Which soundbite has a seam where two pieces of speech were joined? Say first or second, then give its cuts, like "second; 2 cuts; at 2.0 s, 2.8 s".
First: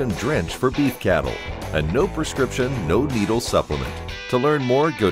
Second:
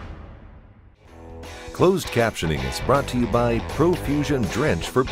second; 1 cut; at 1.3 s